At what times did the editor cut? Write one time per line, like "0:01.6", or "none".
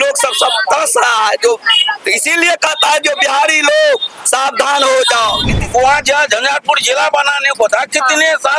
0:05.5